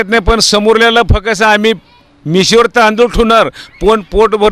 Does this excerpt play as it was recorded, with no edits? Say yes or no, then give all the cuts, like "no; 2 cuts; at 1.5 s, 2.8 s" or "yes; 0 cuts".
yes; 0 cuts